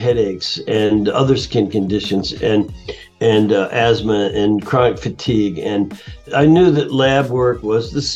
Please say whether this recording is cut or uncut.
cut